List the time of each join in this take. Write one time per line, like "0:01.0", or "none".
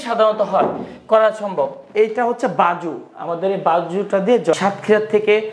0:04.5